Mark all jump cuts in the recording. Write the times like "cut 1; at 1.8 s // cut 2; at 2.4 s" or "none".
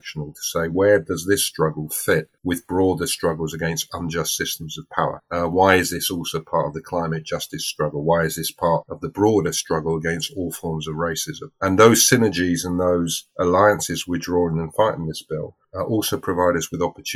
cut 1; at 2.3 s

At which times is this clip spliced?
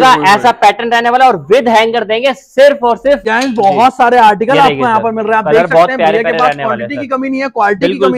cut 1; at 3.2 s

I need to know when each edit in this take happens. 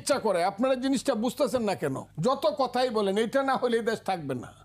cut 1; at 2.1 s

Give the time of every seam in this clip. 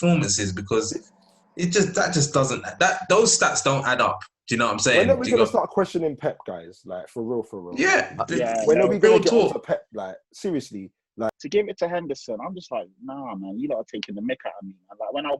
cut 1; at 11.4 s

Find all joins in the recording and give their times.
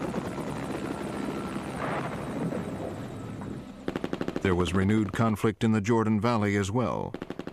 none

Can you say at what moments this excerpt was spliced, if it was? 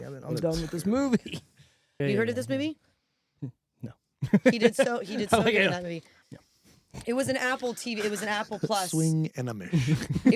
cut 1; at 1.9 s

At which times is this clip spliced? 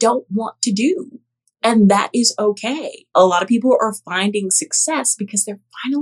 cut 1; at 3.0 s

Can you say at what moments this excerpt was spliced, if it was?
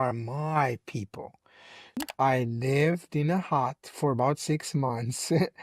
cut 1; at 2.1 s

